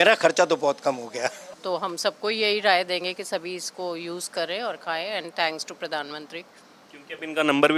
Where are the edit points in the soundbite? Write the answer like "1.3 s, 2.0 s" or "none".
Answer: 1.5 s